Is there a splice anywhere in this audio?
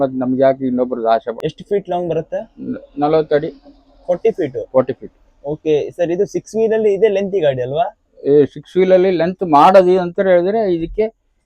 yes; 1 cut; at 1.4 s

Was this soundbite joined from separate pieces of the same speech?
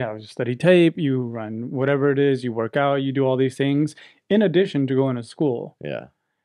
no; 0 cuts

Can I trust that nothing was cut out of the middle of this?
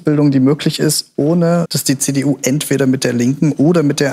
yes; 0 cuts

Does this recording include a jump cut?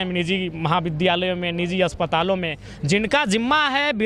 no; 0 cuts

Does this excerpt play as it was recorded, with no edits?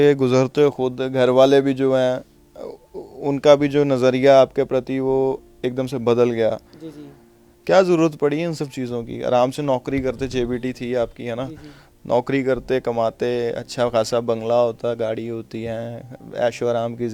yes; 0 cuts

